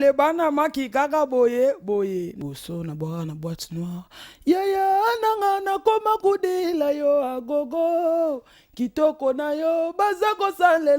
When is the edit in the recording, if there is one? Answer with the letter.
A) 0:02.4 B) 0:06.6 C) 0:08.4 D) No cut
A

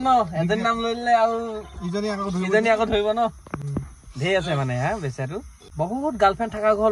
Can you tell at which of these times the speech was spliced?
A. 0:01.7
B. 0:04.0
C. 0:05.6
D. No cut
C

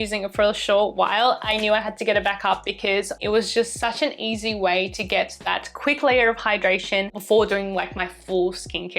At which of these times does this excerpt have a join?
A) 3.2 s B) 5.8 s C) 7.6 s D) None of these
A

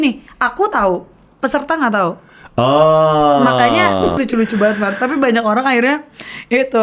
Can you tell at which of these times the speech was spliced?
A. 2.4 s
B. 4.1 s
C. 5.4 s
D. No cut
B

